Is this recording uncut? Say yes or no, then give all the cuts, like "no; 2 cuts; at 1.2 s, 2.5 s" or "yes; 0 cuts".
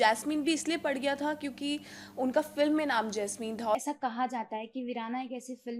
no; 1 cut; at 3.7 s